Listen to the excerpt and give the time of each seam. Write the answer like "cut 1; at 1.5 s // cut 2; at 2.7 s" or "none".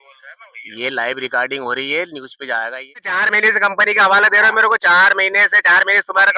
cut 1; at 3.1 s